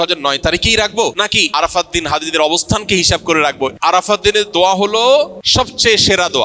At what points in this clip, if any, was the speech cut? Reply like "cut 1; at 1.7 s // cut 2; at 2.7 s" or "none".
cut 1; at 1.5 s // cut 2; at 3.7 s // cut 3; at 5.4 s